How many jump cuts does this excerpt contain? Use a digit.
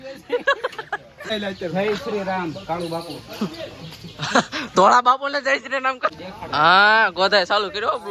2